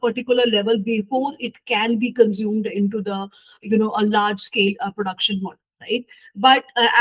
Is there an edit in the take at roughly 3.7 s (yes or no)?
no